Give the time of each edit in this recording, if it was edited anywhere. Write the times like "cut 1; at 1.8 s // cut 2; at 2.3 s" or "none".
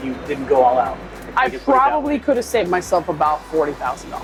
none